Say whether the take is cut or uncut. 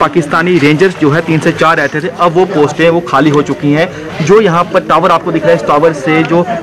uncut